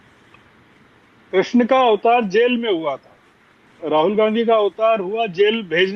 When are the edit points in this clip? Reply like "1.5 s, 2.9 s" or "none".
none